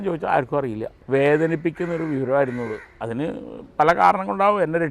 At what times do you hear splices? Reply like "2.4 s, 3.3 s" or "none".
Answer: 0.9 s